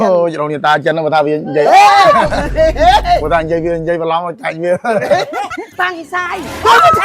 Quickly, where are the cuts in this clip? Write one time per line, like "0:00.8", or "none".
0:05.7